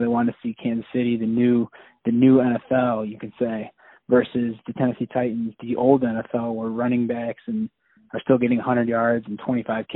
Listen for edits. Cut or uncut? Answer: uncut